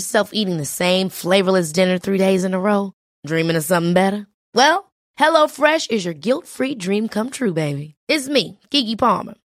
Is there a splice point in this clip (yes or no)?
no